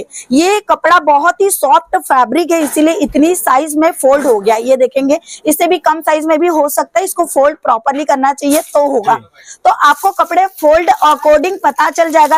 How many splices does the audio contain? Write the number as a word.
zero